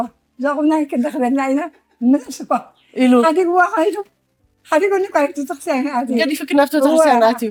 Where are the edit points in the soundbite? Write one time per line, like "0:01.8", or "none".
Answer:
none